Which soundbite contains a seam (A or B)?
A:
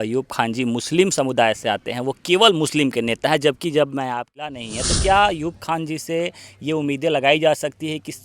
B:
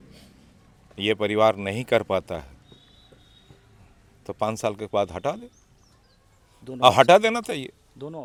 A